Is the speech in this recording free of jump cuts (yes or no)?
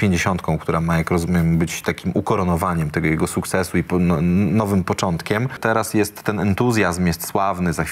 no